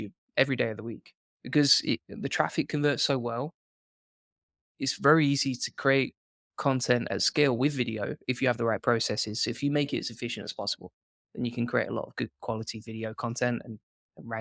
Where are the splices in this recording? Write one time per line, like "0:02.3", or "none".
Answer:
0:04.7

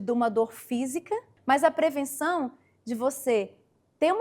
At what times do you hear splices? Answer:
0:01.3

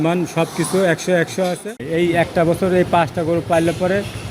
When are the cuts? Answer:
0:01.8

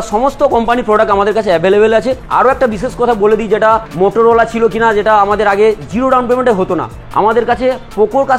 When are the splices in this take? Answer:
none

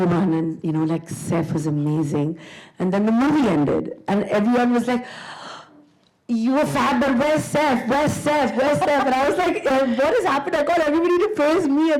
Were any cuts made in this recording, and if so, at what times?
none

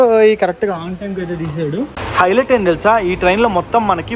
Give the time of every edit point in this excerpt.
0:02.0

